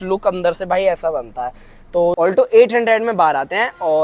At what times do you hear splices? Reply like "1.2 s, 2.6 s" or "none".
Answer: 2.2 s